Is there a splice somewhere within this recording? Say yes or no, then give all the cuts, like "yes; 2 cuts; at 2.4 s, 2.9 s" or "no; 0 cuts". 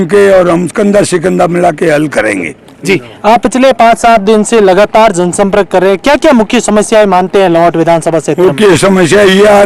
no; 0 cuts